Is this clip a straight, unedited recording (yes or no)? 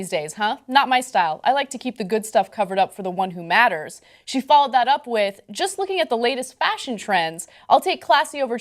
no